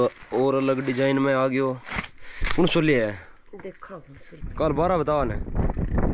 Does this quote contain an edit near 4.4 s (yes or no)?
yes